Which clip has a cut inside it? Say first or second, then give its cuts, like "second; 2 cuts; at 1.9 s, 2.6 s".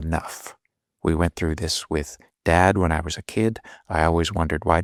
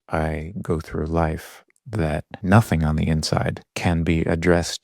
second; 2 cuts; at 2.3 s, 3.6 s